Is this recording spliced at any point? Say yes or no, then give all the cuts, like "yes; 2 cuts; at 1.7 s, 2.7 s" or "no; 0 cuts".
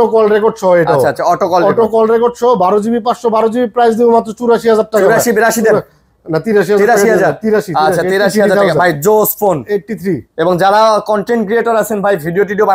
no; 0 cuts